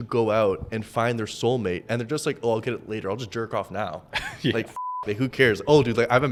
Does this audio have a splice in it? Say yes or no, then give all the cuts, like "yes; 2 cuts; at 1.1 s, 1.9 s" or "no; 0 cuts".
no; 0 cuts